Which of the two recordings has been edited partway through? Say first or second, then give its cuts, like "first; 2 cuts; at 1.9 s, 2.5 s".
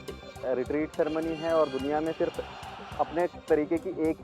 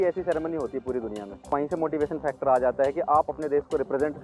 second; 2 cuts; at 1.5 s, 3.3 s